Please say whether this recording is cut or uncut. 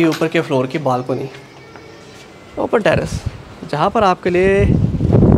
uncut